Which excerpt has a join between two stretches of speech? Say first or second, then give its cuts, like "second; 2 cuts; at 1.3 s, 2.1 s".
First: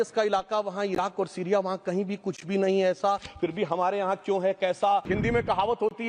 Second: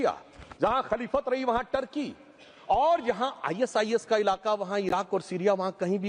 first; 1 cut; at 5.1 s